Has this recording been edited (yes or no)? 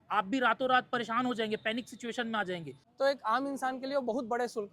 yes